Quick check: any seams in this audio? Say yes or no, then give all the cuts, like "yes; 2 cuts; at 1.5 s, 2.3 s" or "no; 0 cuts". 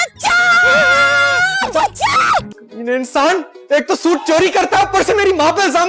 yes; 1 cut; at 2.6 s